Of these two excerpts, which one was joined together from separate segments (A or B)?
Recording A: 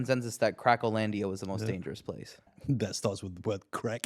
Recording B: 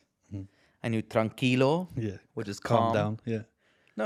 A